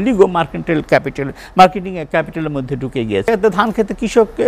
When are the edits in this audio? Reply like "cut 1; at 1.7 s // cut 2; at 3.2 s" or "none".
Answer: cut 1; at 3.3 s